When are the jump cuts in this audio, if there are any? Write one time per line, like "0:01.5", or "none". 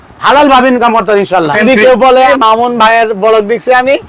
0:01.5
0:02.3